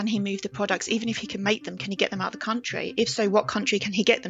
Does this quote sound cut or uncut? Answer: uncut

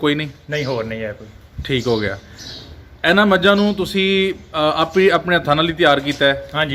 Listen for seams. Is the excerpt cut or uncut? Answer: uncut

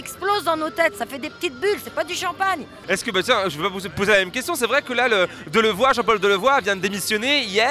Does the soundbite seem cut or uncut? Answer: uncut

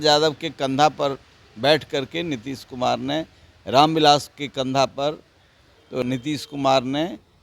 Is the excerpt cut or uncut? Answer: cut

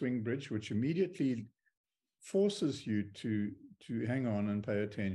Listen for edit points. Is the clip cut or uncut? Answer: uncut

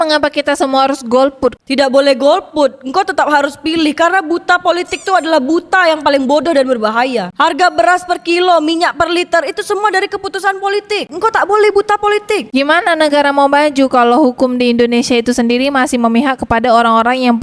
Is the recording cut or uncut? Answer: cut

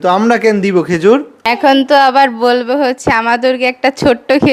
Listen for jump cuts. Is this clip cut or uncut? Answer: cut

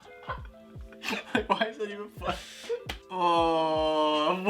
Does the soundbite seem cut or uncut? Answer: cut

